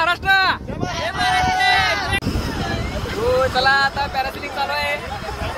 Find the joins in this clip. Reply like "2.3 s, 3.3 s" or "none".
2.2 s